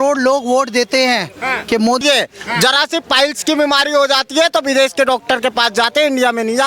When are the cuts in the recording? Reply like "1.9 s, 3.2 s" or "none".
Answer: 2.0 s